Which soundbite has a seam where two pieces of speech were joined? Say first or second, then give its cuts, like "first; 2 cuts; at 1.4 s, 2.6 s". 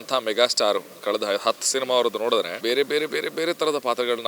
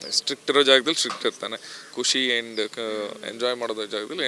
first; 1 cut; at 2.5 s